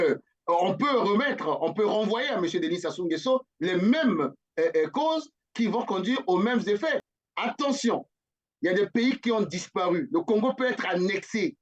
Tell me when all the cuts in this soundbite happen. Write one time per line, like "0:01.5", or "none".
0:07.1